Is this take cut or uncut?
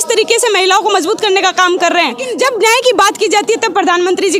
cut